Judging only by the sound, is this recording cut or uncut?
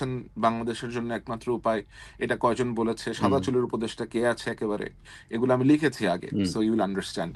uncut